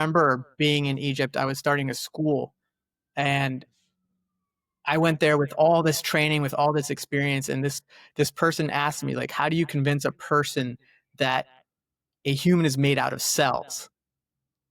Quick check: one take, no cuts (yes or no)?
yes